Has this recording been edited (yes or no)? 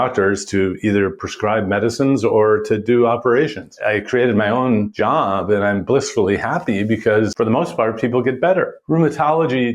yes